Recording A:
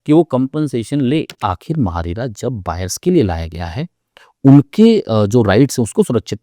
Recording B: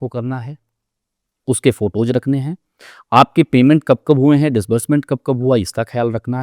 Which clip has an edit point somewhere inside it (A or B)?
A